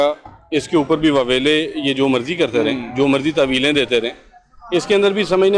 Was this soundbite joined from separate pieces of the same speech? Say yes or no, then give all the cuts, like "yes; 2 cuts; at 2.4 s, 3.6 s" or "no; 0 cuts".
no; 0 cuts